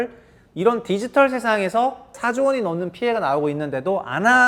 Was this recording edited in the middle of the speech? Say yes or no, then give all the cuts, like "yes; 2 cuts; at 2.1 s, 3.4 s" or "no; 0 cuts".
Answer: no; 0 cuts